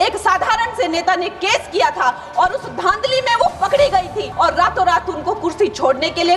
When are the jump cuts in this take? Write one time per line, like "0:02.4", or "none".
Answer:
0:04.3